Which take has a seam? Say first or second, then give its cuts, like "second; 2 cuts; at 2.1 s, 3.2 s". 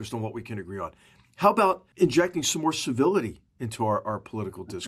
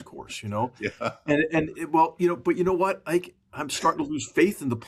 first; 1 cut; at 1.9 s